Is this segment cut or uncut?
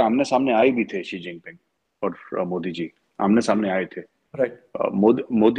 uncut